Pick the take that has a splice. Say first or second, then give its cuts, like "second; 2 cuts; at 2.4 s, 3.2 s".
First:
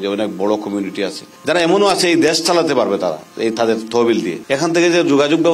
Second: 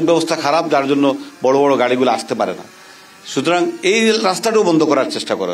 first; 2 cuts; at 1.3 s, 4.4 s